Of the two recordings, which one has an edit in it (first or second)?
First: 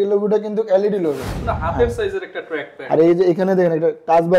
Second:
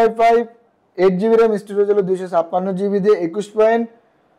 first